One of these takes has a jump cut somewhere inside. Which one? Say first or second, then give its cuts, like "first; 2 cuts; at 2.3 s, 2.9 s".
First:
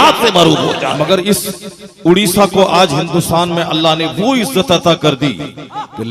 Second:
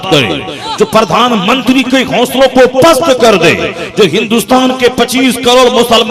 first; 1 cut; at 0.9 s